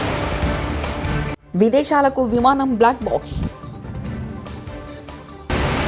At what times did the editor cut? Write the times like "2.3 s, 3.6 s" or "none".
1.4 s